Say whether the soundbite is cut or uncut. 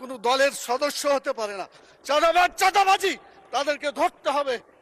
uncut